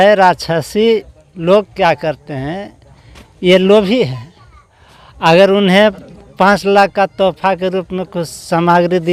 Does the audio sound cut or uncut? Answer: uncut